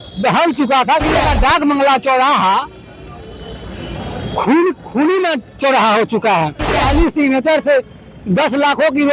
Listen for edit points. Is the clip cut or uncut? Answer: cut